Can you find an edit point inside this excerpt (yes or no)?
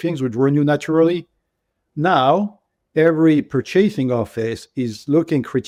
no